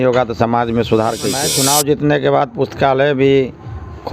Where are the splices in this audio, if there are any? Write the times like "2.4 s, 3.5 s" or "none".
1.5 s